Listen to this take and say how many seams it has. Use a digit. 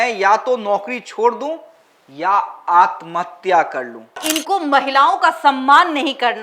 1